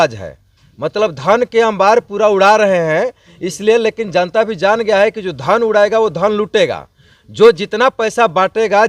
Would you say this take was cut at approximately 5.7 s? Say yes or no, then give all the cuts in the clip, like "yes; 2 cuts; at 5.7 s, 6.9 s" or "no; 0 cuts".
no; 0 cuts